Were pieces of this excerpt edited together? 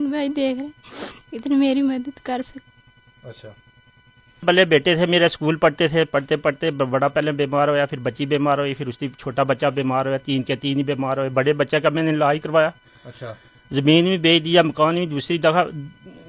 yes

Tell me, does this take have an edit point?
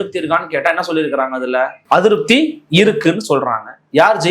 yes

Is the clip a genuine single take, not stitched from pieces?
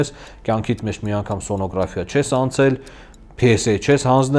yes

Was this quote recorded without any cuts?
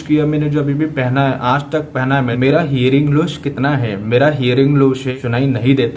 no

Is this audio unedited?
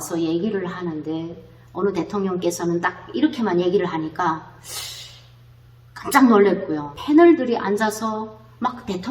no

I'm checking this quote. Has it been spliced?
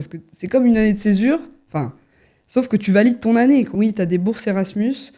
yes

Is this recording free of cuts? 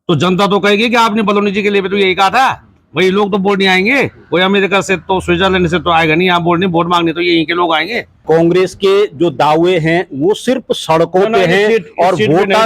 no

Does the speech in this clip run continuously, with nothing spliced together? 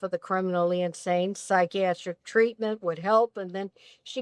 yes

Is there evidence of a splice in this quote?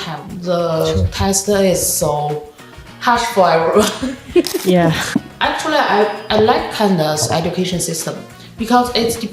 yes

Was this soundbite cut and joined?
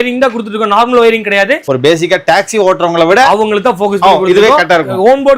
yes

